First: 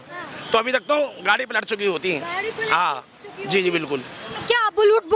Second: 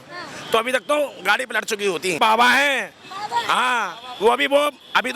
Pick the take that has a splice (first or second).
second